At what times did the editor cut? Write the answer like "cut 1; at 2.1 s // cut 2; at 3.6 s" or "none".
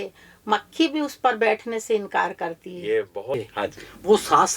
cut 1; at 3.3 s